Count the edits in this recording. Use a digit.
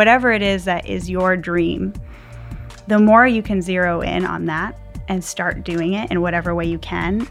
0